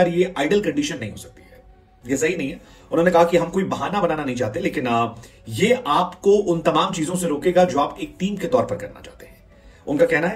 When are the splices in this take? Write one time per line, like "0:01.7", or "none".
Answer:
none